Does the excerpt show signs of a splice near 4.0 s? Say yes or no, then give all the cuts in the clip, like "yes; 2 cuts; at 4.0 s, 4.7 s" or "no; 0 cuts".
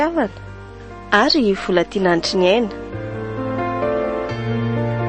no; 1 cut; at 2.8 s